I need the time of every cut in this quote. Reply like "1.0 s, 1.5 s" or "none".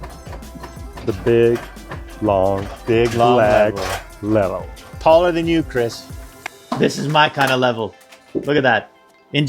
6.5 s